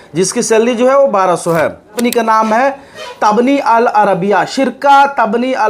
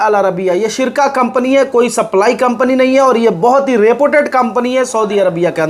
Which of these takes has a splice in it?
first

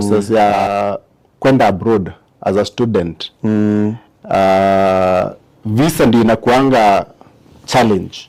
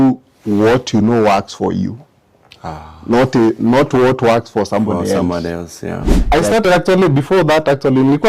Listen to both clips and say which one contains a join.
second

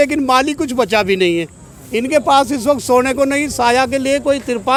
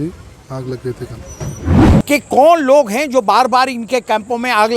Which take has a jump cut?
second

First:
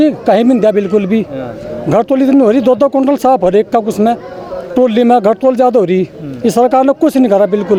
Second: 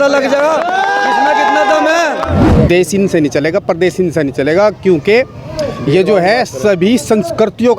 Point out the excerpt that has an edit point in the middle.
second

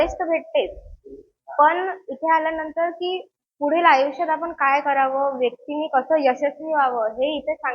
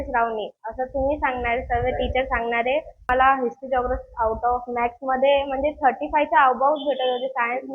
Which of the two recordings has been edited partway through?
second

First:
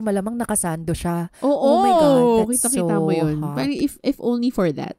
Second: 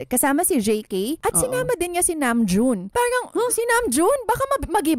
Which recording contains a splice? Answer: second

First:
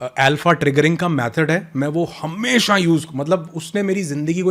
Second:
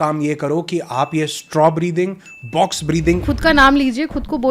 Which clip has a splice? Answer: second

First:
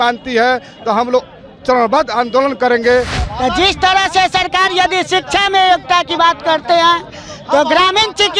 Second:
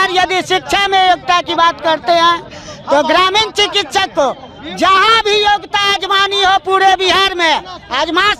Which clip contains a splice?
first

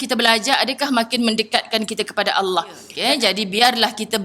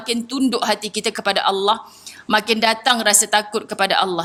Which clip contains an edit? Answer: first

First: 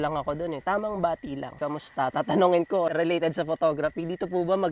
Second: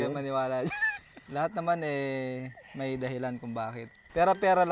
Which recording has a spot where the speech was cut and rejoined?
first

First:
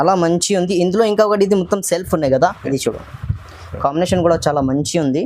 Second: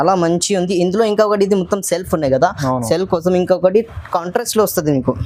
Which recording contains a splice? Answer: first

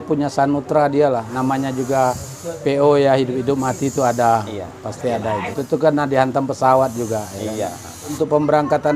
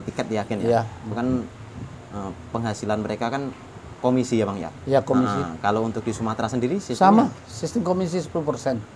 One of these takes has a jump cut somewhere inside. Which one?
first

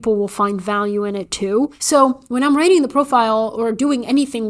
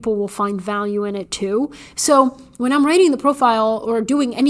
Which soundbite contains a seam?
first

